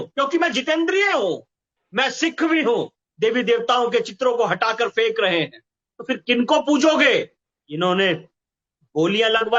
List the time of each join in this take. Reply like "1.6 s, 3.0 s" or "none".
3.0 s, 5.9 s, 7.4 s

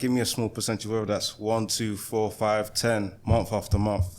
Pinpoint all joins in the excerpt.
3.2 s

